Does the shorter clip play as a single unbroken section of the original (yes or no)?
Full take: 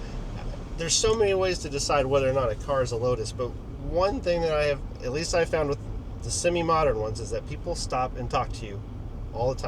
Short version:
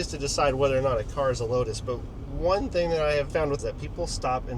no